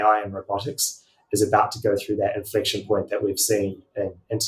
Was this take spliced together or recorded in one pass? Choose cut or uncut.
uncut